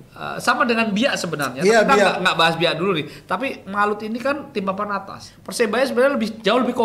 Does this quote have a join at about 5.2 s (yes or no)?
yes